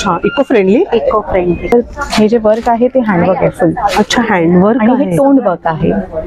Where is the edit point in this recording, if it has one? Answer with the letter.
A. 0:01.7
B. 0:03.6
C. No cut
A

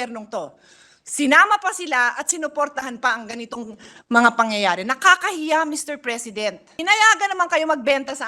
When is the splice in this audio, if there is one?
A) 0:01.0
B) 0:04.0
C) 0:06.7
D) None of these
C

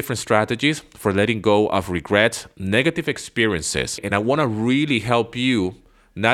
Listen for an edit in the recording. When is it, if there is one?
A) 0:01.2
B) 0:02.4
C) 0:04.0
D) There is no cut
C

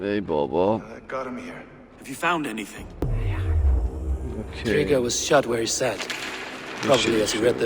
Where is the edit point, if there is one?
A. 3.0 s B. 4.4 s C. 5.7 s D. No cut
A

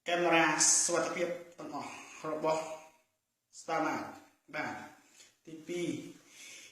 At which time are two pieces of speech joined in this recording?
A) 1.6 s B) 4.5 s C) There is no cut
A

